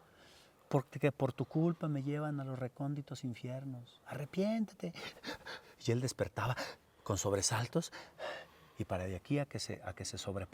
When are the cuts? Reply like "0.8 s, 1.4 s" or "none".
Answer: none